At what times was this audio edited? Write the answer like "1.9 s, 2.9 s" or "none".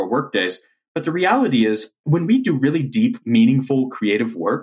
2.0 s, 3.2 s